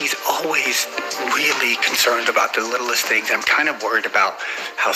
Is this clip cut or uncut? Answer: uncut